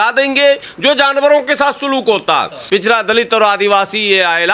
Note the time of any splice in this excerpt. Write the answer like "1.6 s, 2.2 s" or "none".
2.5 s